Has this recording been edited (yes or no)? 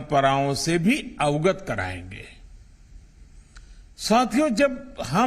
yes